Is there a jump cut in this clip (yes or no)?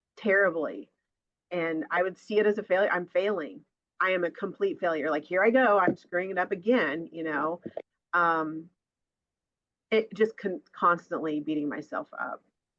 no